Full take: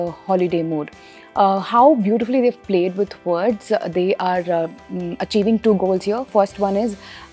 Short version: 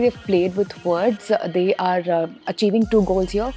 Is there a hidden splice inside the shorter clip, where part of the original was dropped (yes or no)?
yes